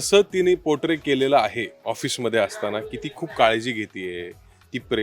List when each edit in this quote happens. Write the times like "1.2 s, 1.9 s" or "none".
1.7 s